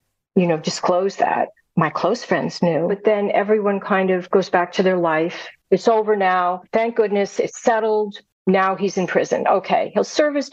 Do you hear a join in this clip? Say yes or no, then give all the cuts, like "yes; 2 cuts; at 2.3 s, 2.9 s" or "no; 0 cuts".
yes; 4 cuts; at 3.0 s, 5.6 s, 6.6 s, 8.2 s